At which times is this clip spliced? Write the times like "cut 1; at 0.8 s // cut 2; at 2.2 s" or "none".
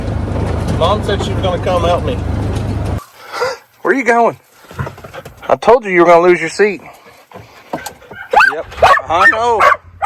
cut 1; at 3.0 s

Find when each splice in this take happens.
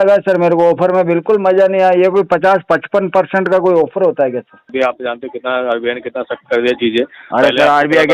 cut 1; at 4.7 s

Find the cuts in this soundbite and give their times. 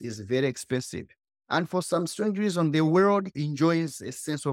none

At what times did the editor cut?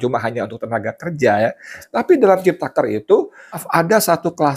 cut 1; at 1.9 s // cut 2; at 3.6 s

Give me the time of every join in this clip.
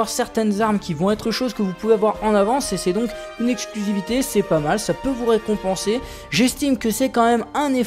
none

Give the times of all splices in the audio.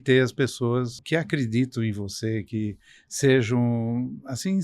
cut 1; at 1.0 s

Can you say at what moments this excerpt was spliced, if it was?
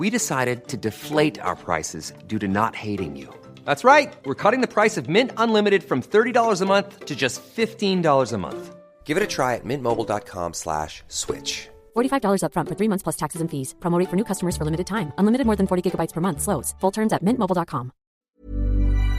cut 1; at 18.2 s

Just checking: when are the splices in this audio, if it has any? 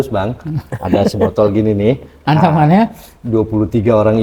none

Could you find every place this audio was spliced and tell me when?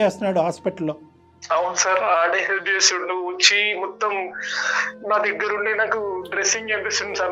none

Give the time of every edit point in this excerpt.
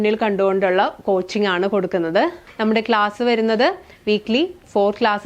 cut 1; at 2.4 s

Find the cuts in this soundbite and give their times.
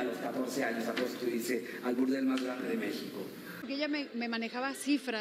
cut 1; at 3.6 s

